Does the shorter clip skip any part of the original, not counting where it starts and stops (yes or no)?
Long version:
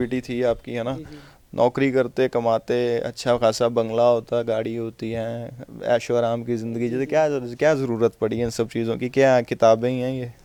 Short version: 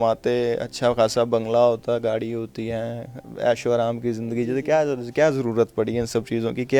no